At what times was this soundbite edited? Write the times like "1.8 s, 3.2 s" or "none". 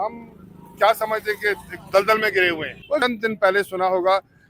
2.9 s

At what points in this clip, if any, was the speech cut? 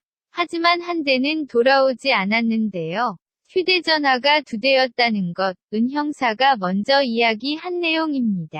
none

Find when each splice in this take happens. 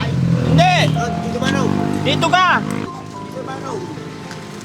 2.9 s

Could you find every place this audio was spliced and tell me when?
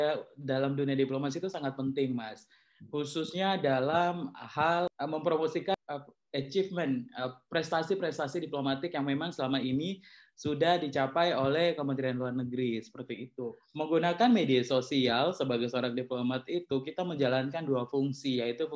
4.9 s, 5.7 s, 13.6 s

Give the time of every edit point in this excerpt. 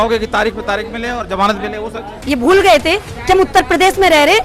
2.2 s

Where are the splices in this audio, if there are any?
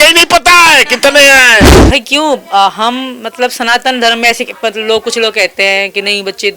1.7 s

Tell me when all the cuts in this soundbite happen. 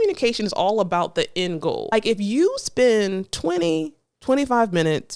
1.9 s

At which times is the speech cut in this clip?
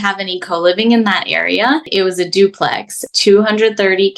1.9 s, 3.0 s

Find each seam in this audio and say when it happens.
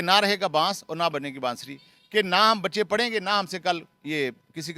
none

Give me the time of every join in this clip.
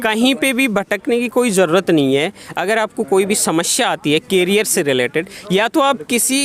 none

